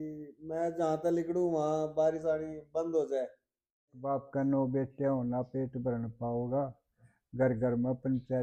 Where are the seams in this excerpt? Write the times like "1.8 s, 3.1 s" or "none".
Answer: 4.1 s